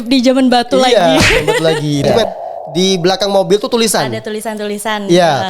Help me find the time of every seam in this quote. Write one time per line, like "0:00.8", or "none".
0:02.0

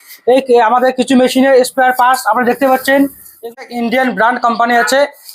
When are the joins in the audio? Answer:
0:03.6

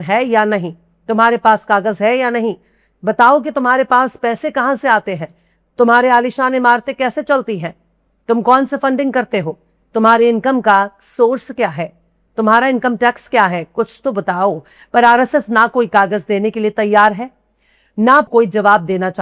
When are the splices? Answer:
0:18.3

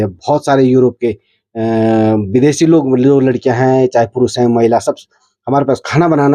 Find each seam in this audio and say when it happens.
none

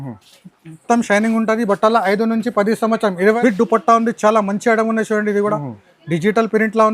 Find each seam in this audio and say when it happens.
0:03.4

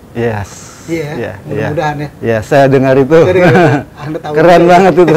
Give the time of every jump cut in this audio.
none

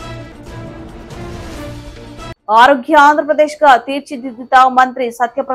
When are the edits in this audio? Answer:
0:02.3

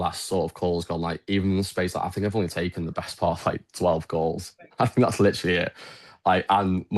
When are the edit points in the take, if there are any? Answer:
none

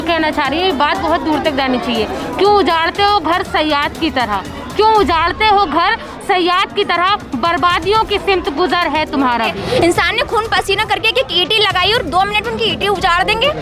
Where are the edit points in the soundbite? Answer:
0:09.6

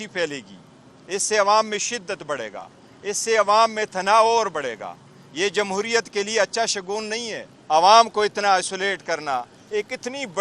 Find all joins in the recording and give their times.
0:07.5

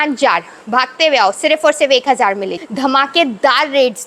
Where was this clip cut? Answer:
0:02.5

